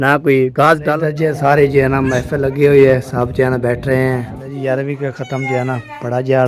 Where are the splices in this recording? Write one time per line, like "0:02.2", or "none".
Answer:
0:00.9
0:04.4